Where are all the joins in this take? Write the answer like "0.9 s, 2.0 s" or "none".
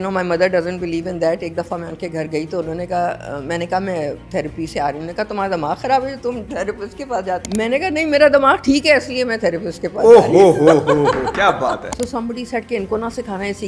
7.4 s, 11.9 s